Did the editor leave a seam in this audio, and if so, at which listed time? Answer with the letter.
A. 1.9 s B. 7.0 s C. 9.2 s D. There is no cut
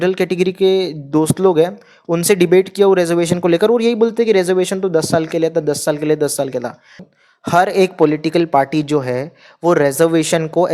B